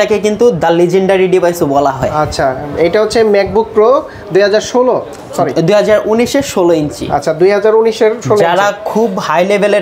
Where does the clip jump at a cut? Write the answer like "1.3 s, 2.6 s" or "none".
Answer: none